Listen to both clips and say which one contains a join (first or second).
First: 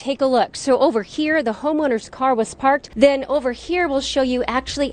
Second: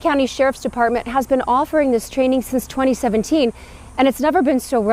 first